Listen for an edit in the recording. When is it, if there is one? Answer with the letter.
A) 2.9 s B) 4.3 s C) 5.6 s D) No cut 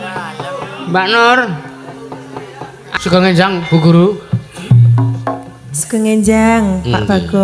A